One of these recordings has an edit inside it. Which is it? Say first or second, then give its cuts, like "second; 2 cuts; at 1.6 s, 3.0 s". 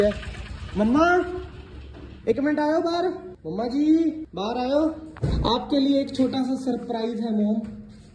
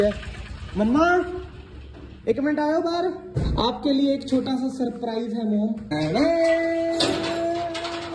second; 2 cuts; at 3.3 s, 5.9 s